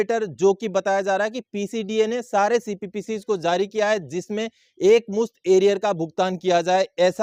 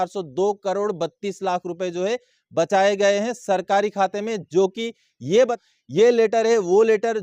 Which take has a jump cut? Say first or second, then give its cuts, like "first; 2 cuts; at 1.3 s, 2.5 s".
second; 1 cut; at 5.6 s